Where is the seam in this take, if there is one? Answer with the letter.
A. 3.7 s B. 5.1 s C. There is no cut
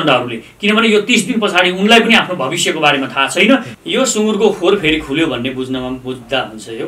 A